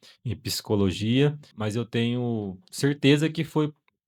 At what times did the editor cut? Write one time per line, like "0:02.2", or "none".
0:01.5